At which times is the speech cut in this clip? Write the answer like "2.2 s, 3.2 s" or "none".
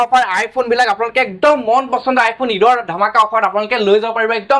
none

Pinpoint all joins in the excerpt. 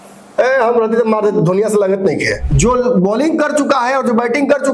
2.4 s

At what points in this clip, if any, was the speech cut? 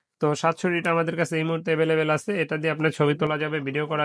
none

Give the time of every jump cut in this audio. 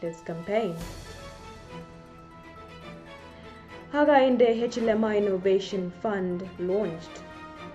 none

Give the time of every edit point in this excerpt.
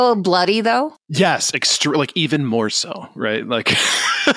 1.0 s

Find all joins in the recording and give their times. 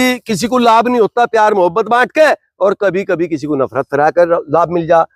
none

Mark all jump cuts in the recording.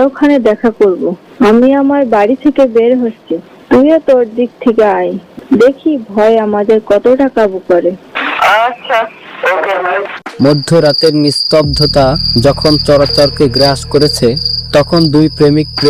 none

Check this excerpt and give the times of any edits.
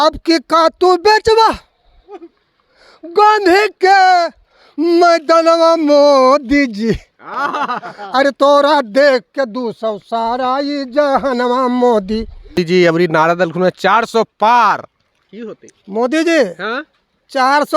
12.5 s

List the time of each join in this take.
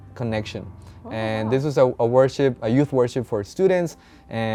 none

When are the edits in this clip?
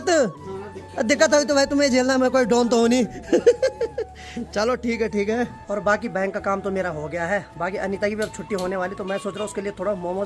none

